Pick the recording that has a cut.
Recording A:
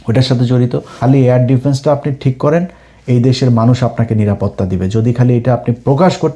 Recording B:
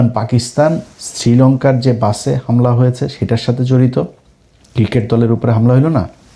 A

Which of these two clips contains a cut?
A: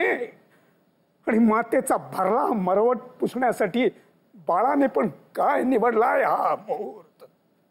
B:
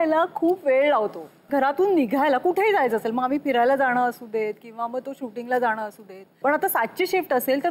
B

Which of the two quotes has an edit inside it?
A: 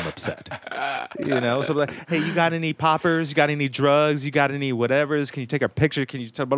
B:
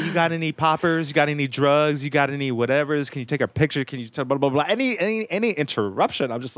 A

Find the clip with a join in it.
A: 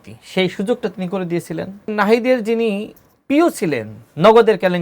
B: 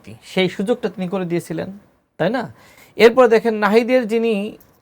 A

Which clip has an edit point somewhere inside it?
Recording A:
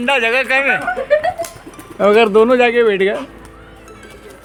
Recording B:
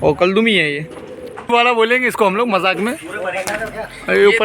B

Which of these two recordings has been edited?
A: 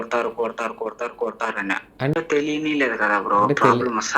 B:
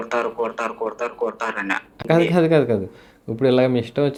A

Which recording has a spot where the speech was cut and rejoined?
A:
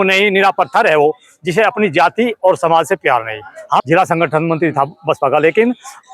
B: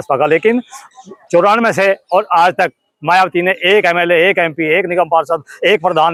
A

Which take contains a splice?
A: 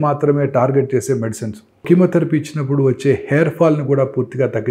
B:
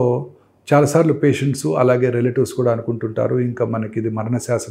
A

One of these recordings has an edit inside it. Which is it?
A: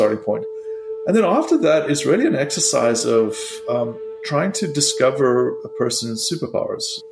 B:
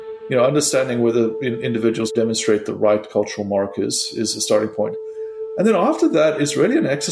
B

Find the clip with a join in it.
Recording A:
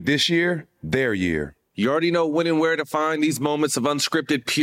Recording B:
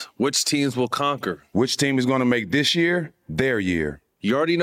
B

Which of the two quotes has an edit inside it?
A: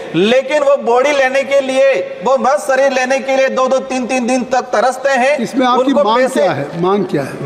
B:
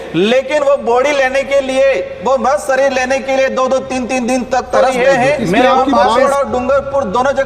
B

